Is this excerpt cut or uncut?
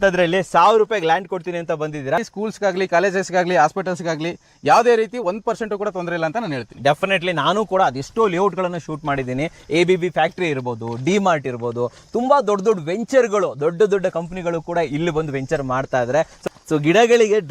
cut